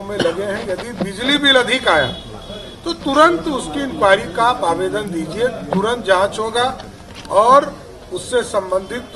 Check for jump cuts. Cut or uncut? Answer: uncut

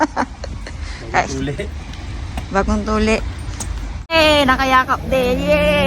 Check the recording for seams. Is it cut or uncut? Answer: cut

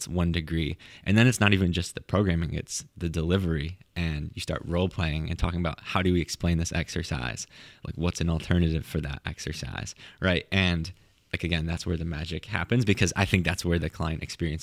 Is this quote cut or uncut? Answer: uncut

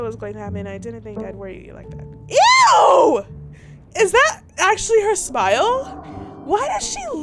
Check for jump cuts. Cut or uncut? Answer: uncut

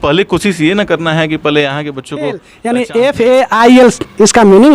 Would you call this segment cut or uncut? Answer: cut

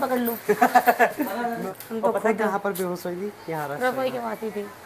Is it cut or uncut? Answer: cut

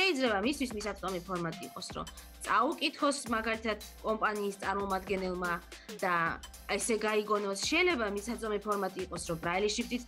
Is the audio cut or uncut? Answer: uncut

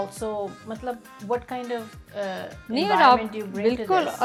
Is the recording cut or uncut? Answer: uncut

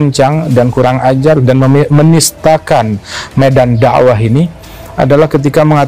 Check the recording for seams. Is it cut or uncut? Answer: uncut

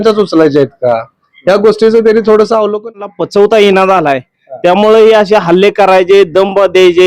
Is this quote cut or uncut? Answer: cut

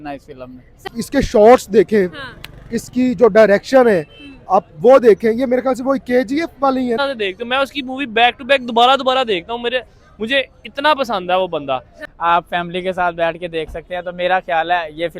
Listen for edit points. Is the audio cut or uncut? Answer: cut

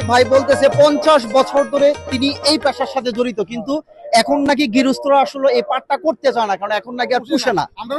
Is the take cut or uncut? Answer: uncut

